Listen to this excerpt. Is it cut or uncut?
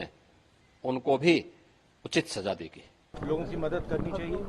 cut